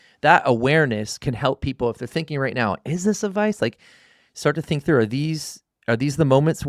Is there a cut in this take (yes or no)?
no